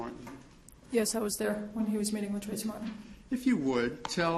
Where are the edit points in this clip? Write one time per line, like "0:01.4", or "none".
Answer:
0:03.0